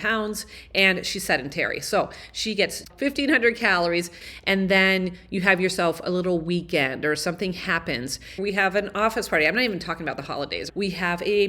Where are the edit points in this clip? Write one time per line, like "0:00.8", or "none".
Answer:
0:02.9
0:04.2
0:08.4
0:10.6